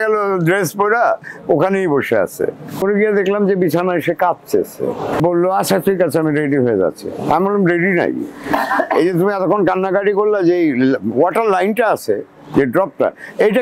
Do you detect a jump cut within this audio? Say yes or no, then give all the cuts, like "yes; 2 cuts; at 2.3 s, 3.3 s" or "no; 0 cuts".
yes; 2 cuts; at 2.8 s, 5.2 s